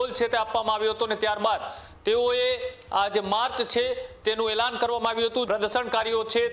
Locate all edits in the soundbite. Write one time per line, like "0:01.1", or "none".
0:05.5